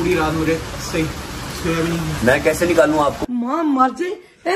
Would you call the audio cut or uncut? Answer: cut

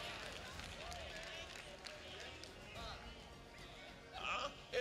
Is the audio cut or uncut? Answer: uncut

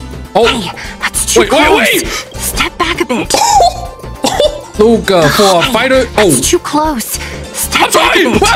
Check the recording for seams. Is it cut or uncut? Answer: uncut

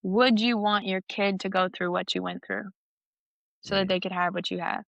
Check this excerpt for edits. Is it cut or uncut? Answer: uncut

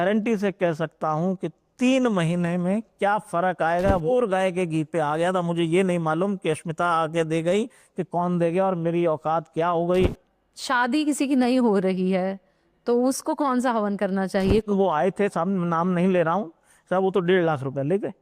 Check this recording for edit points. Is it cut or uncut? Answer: cut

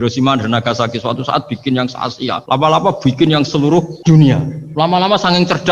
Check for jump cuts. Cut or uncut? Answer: cut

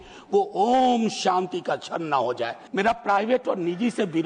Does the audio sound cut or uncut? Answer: cut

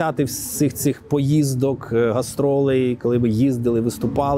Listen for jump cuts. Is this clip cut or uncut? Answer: uncut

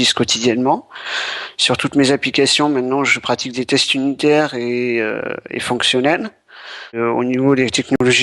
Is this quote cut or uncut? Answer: cut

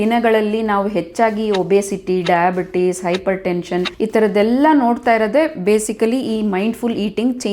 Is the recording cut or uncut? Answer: cut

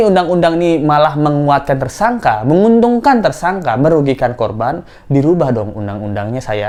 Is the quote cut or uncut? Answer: uncut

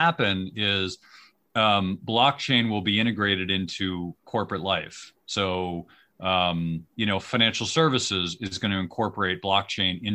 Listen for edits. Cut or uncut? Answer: uncut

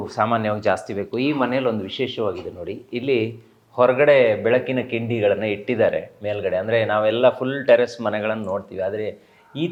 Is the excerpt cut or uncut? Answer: uncut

